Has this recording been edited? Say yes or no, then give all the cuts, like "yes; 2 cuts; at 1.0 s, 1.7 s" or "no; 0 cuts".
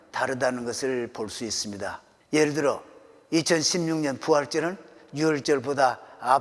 yes; 2 cuts; at 2.1 s, 5.4 s